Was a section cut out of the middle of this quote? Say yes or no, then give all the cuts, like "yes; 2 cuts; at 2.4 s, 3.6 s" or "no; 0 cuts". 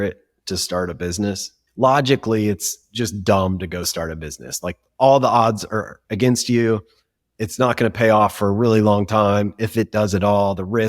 yes; 1 cut; at 1.6 s